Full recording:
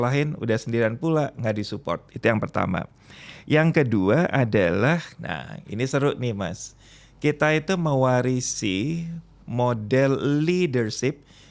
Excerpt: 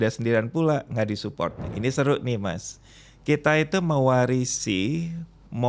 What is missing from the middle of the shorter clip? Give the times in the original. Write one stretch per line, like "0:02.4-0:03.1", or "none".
0:02.1-0:05.6